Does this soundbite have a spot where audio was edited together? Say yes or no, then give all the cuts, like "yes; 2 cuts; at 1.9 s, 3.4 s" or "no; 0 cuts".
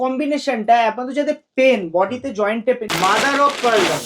yes; 1 cut; at 2.8 s